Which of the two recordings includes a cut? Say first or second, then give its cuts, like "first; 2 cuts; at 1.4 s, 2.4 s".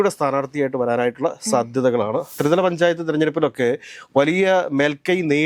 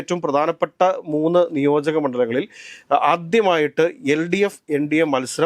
first; 1 cut; at 2.3 s